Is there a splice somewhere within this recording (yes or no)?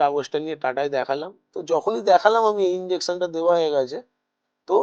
no